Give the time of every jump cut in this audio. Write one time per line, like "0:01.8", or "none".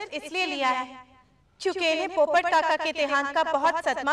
none